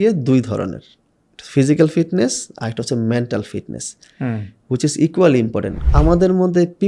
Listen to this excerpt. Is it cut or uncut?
cut